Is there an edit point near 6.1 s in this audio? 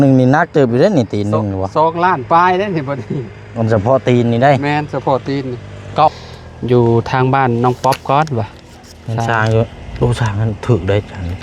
yes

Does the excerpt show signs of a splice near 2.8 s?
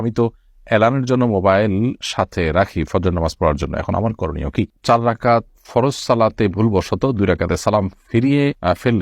no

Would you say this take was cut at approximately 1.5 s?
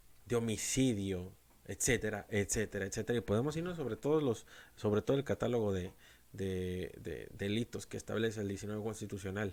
no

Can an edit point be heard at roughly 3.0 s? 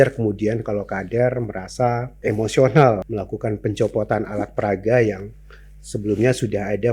yes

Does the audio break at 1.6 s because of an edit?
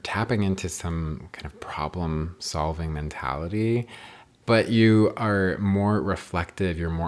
no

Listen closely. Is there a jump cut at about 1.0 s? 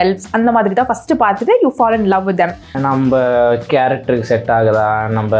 no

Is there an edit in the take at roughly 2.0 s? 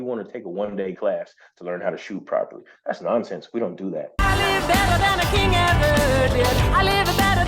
no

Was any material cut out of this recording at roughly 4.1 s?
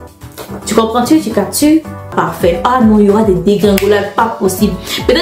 no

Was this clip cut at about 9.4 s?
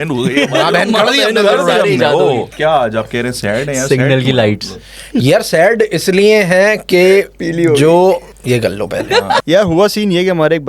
yes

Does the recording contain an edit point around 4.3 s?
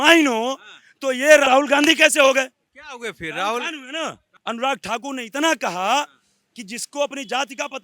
yes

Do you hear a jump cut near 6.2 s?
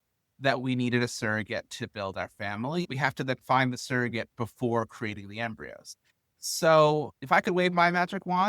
yes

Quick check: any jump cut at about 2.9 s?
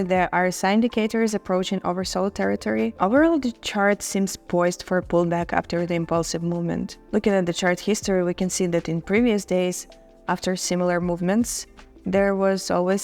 yes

